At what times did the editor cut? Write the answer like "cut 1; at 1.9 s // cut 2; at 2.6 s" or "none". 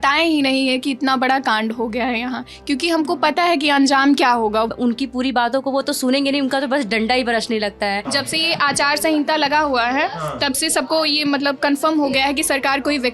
cut 1; at 4.7 s // cut 2; at 8.0 s